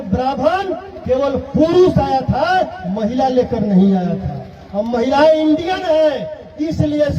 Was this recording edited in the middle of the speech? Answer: no; 0 cuts

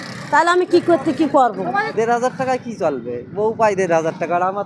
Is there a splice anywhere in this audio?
yes; 1 cut; at 1.9 s

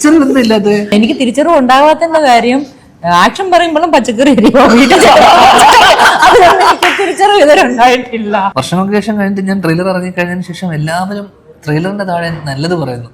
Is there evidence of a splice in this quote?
yes; 2 cuts; at 0.9 s, 8.5 s

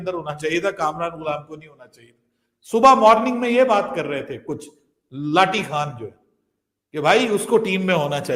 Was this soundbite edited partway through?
no; 0 cuts

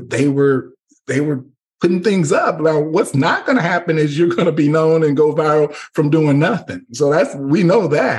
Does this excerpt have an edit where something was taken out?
no; 0 cuts

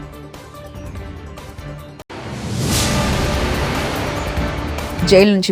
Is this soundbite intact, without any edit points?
no; 2 cuts; at 0.7 s, 1.5 s

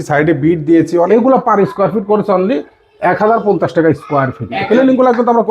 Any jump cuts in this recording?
yes; 2 cuts; at 1.1 s, 4.6 s

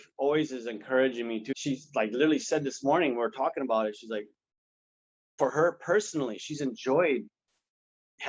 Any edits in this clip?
yes; 1 cut; at 1.5 s

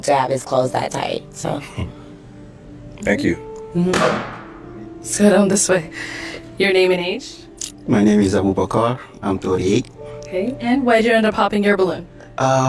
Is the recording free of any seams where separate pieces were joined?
yes; 0 cuts

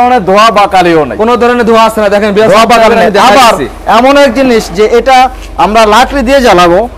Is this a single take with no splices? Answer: yes; 0 cuts

